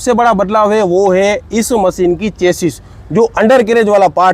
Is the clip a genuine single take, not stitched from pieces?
yes; 0 cuts

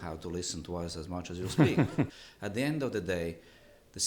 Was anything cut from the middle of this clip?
yes; 1 cut; at 2.2 s

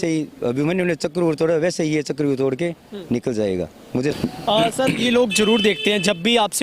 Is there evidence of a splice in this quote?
yes; 1 cut; at 4.2 s

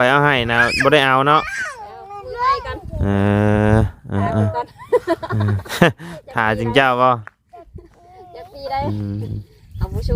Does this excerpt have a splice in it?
no; 0 cuts

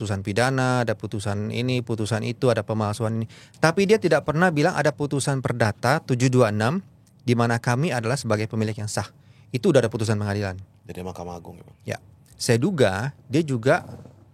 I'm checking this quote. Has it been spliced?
no; 0 cuts

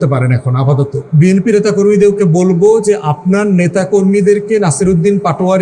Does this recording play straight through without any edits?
no; 1 cut; at 1.0 s

